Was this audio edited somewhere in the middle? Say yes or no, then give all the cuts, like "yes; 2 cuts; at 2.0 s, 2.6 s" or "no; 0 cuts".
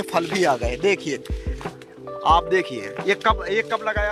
no; 0 cuts